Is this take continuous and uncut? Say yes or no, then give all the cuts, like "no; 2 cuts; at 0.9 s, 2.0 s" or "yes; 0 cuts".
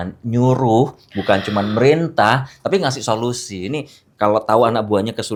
yes; 0 cuts